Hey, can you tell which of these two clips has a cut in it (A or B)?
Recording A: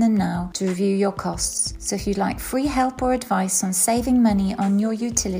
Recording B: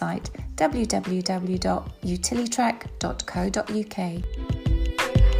B